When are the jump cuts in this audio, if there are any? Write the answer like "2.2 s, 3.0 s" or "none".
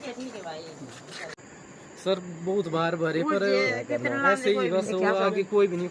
1.4 s